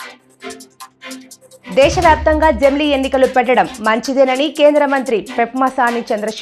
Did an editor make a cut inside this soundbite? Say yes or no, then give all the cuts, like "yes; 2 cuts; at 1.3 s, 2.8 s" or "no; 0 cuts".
no; 0 cuts